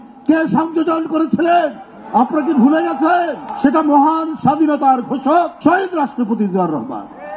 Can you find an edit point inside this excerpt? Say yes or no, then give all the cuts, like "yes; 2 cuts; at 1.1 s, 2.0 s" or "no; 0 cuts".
no; 0 cuts